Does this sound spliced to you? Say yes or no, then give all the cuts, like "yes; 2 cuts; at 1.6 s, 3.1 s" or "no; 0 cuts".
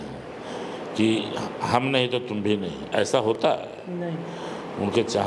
no; 0 cuts